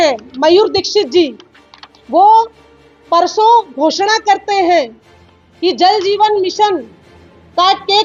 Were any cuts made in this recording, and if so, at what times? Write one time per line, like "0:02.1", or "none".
none

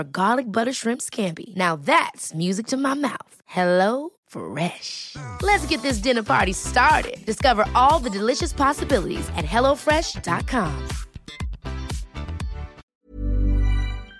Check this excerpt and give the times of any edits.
0:12.9

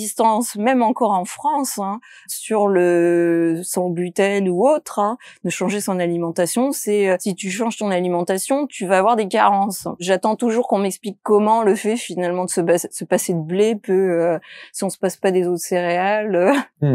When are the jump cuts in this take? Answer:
0:02.3
0:07.3
0:10.0

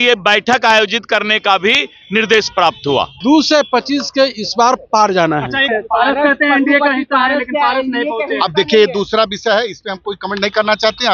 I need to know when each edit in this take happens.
0:03.1
0:05.7

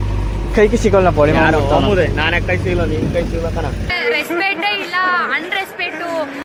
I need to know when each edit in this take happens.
none

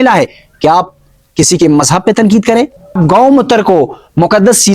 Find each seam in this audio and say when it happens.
0:03.0

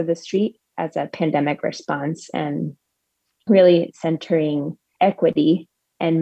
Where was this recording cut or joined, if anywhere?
none

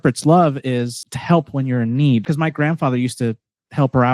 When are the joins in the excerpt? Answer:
0:01.1
0:02.3

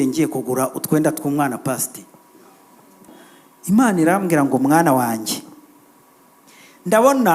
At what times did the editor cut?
0:03.1

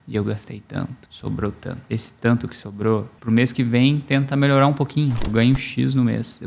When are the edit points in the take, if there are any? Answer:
0:01.1
0:01.8
0:03.1
0:05.3

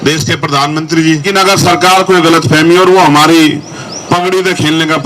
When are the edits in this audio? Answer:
0:01.2

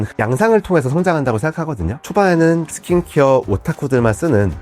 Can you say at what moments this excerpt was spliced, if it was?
0:01.9

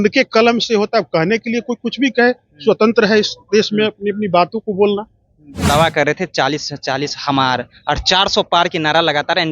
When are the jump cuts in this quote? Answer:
0:05.7

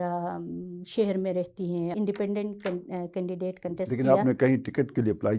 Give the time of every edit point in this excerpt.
0:01.9

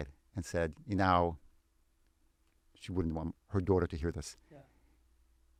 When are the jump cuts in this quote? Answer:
none

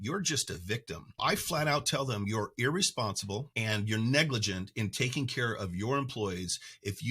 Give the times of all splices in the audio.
0:01.2
0:03.5

